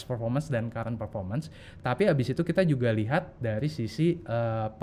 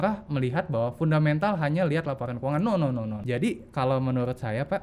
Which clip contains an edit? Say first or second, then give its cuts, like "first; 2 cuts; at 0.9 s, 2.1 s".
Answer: second; 1 cut; at 3.2 s